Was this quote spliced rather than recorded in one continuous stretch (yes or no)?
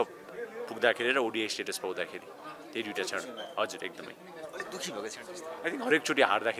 no